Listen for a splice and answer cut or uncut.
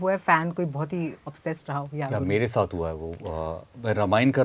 uncut